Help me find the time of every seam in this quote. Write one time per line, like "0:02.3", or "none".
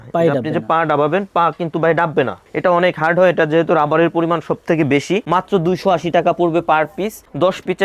0:05.2